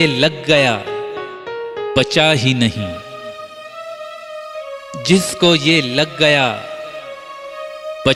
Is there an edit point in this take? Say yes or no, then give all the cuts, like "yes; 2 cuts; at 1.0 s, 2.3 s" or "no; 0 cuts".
no; 0 cuts